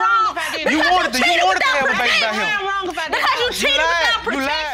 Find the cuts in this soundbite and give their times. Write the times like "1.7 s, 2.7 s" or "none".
none